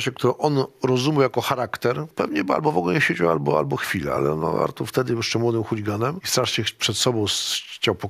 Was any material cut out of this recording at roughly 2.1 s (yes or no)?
yes